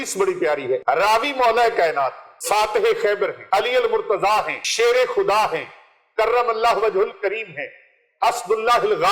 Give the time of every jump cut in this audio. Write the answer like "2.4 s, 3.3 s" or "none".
0.8 s, 2.3 s, 3.4 s, 4.6 s